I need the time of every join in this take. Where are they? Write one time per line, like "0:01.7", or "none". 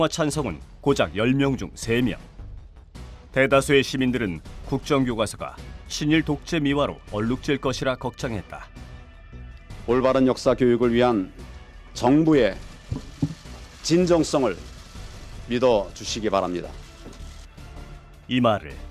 0:04.8